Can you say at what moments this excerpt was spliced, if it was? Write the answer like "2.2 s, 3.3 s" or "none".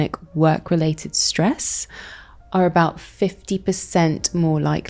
none